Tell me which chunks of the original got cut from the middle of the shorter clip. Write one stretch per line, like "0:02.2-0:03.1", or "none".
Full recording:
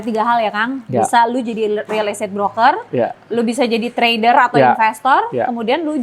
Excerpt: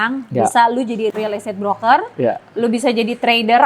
0:01.7-0:01.9